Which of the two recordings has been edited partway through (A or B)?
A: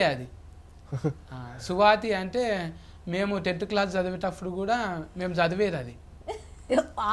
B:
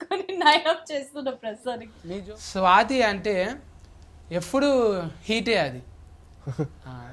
B